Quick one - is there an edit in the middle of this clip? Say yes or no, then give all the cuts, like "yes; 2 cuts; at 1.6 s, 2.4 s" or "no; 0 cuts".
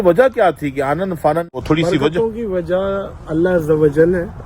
yes; 1 cut; at 1.6 s